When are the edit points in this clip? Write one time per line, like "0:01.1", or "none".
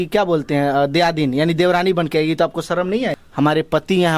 0:03.2